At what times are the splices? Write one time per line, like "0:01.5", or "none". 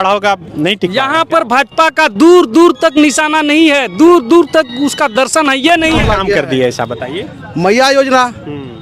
0:06.0